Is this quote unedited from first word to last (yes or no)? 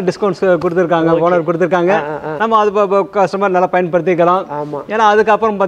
yes